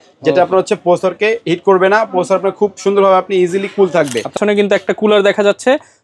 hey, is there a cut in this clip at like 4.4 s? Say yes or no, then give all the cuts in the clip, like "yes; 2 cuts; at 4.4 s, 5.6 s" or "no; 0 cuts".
yes; 1 cut; at 4.4 s